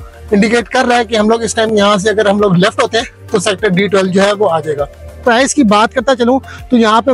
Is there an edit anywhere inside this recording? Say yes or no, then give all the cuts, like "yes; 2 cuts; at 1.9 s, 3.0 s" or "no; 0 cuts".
yes; 1 cut; at 5.1 s